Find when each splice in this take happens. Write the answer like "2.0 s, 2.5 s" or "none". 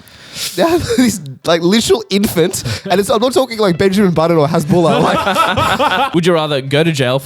6.1 s

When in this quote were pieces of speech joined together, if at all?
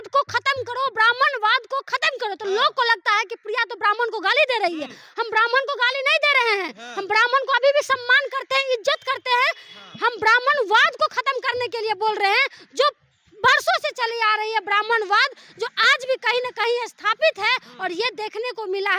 none

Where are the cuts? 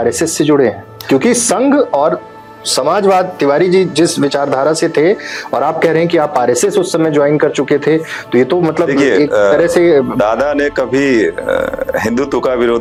none

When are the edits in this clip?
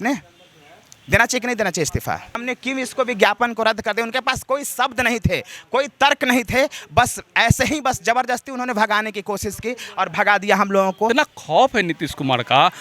2.4 s, 11.1 s

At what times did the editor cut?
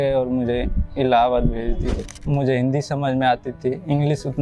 2.1 s

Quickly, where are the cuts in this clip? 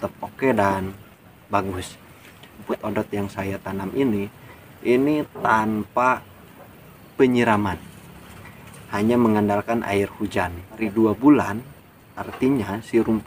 2.7 s, 10.8 s

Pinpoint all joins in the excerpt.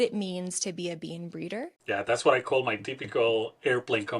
1.8 s

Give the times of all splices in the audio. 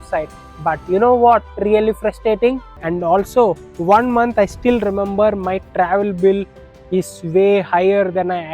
2.7 s

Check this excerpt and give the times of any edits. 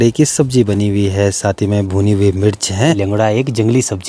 3.0 s

